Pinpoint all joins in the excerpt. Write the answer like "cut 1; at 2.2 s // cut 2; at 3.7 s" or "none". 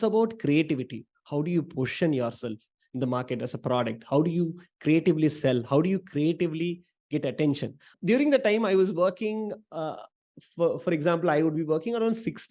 cut 1; at 7.9 s